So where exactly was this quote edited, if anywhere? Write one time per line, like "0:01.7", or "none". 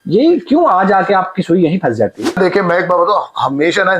0:02.4